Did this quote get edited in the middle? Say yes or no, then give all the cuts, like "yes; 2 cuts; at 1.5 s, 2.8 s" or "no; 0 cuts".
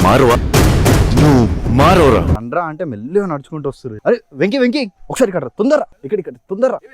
yes; 2 cuts; at 3.9 s, 6.0 s